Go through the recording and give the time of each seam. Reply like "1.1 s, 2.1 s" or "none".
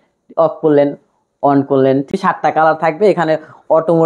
2.1 s